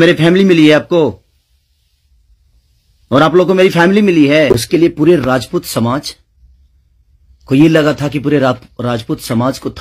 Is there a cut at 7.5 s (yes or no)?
no